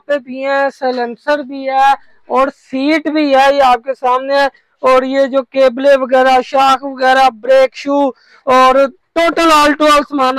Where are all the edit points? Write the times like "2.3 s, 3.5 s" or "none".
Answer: none